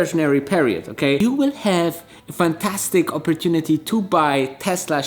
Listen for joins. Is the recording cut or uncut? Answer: cut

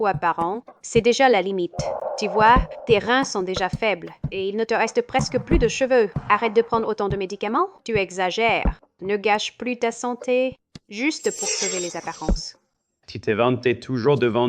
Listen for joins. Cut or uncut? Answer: uncut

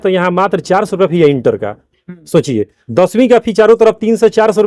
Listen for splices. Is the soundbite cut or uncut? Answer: uncut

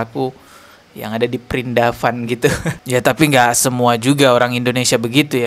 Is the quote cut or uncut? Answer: cut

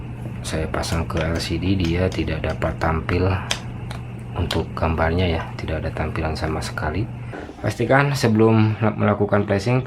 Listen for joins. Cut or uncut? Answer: cut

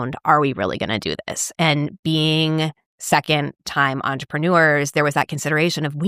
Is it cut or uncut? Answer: uncut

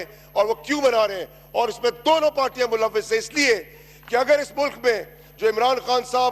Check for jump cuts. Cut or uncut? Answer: uncut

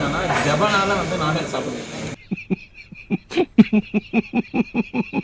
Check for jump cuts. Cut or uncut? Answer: uncut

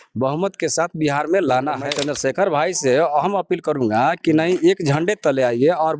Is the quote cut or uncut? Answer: cut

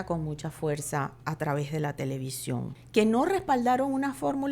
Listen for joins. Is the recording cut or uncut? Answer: cut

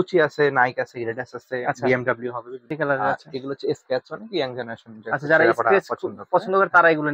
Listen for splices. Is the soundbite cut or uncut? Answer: cut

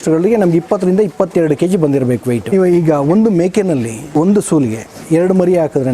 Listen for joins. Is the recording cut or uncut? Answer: cut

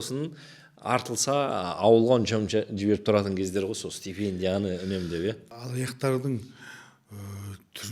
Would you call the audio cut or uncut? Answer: cut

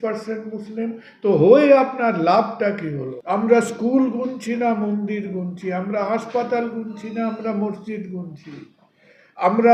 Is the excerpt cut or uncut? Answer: cut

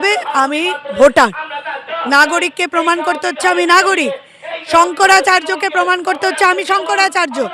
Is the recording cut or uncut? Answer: uncut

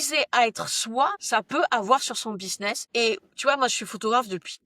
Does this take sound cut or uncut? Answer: cut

